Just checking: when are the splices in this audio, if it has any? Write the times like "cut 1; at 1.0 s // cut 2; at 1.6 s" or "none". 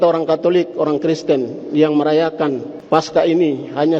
cut 1; at 2.7 s